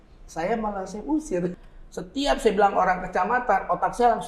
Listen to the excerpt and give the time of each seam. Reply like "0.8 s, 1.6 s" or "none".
1.6 s